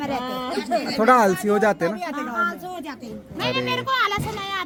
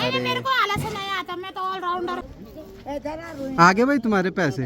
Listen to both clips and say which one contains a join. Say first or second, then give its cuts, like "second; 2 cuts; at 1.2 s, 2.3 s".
second; 1 cut; at 2.2 s